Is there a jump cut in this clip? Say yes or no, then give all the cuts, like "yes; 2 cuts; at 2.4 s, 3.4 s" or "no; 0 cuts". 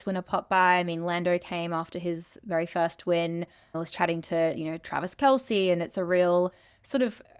no; 0 cuts